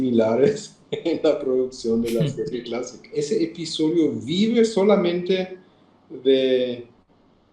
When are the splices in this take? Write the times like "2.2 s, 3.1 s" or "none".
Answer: 3.1 s

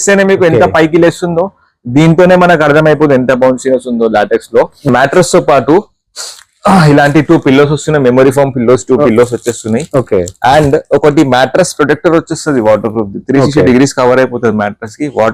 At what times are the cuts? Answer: 4.9 s

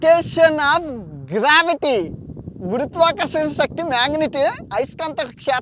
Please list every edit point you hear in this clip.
none

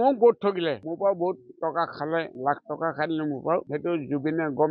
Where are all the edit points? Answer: 0.9 s, 2.3 s, 3.7 s

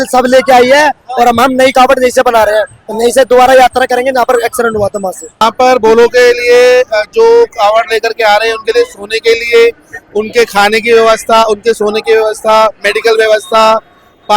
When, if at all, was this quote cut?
5.4 s

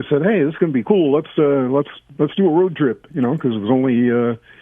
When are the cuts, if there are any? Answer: none

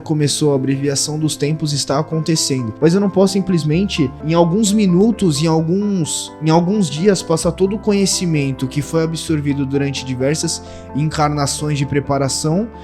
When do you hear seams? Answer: 2.7 s, 4.2 s

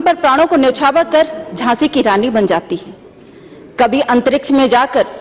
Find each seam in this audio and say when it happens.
none

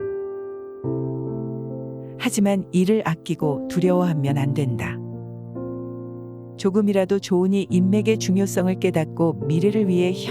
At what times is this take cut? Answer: none

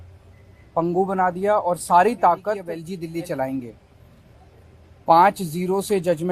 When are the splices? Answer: 2.9 s

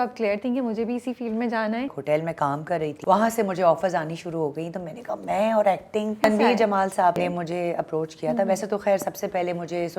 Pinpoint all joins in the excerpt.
2.0 s, 3.0 s, 6.2 s, 7.2 s

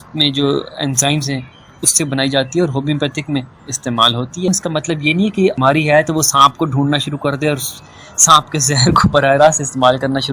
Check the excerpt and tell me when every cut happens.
4.5 s, 5.6 s

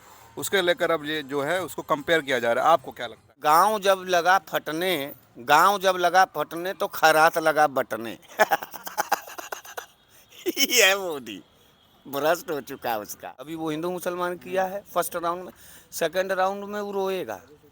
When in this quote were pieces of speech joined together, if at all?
3.3 s, 13.5 s

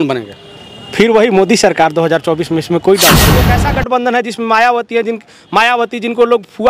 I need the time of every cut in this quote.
3.5 s

